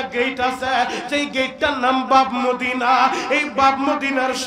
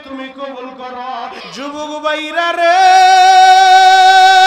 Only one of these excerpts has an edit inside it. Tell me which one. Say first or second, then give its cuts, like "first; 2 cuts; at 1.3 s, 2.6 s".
second; 1 cut; at 1.4 s